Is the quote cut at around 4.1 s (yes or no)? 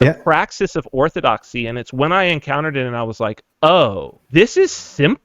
yes